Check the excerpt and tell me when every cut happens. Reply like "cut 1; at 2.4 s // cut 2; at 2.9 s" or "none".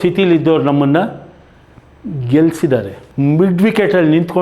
cut 1; at 3.0 s